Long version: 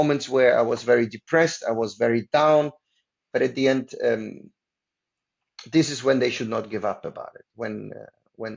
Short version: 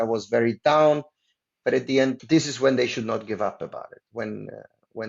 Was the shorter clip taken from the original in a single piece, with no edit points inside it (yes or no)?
no